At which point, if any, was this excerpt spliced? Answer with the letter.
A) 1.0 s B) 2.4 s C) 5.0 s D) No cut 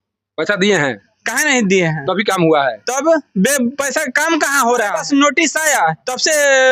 C